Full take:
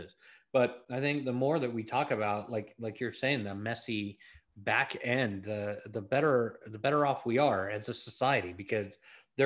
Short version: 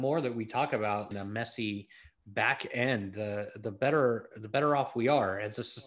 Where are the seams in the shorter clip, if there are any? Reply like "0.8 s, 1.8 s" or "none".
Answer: 1.1 s